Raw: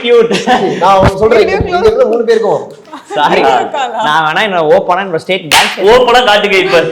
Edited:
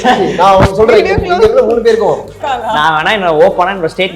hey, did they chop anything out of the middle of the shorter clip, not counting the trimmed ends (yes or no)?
yes